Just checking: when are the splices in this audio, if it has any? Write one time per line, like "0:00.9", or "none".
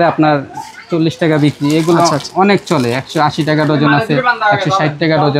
none